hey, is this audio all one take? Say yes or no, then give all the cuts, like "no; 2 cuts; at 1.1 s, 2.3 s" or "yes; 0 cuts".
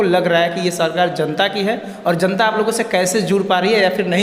yes; 0 cuts